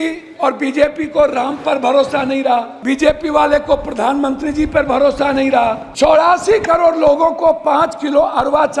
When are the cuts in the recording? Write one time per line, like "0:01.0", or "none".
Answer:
0:02.7
0:05.9